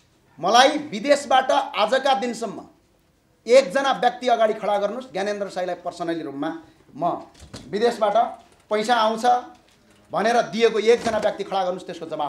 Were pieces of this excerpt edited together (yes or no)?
no